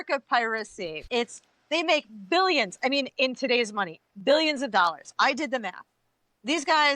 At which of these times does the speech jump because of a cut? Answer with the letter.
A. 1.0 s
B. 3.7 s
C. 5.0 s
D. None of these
A